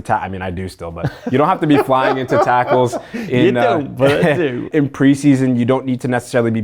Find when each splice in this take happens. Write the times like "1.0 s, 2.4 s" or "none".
none